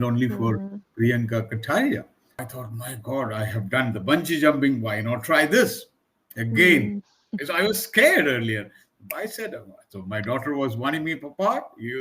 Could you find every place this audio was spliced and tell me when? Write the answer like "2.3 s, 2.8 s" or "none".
2.6 s

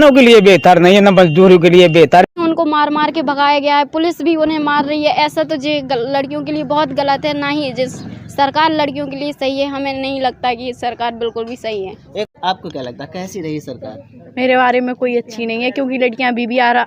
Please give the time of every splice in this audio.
2.3 s, 12.3 s

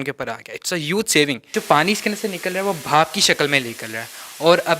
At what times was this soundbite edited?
1.5 s

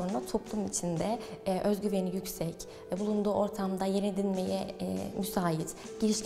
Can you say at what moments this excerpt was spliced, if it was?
none

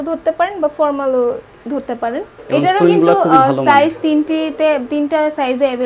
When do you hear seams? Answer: 2.3 s

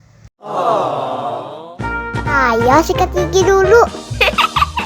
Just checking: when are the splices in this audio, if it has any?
none

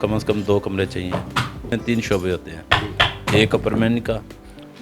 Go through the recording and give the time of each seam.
1.6 s

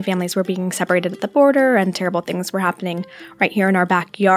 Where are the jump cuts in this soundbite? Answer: none

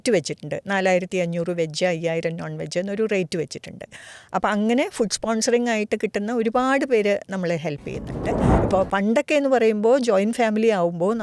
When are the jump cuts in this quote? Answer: 8.5 s

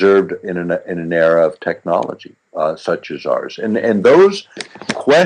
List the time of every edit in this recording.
1.8 s

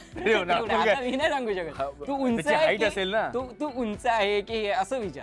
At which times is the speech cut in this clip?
none

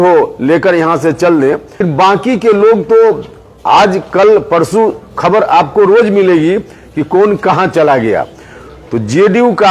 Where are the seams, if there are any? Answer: 1.8 s

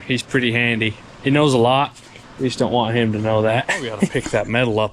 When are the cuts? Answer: 1.0 s, 4.1 s

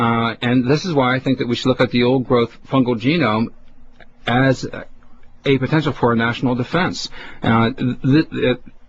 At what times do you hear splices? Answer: 7.6 s

